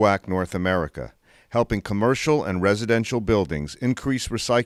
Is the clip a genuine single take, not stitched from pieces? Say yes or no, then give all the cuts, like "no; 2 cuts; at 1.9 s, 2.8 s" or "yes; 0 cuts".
yes; 0 cuts